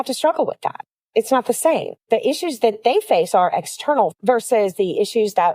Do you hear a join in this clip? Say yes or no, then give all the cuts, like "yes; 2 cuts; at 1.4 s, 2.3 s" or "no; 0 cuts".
yes; 1 cut; at 4.1 s